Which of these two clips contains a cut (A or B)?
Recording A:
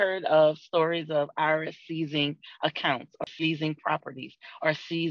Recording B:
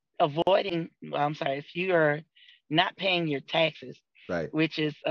A